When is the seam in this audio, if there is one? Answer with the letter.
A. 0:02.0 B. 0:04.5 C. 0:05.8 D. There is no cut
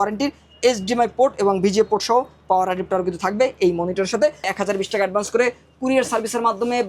B